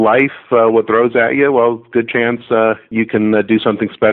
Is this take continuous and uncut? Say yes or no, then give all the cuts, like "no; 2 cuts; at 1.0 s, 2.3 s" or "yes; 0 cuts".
no; 1 cut; at 2.8 s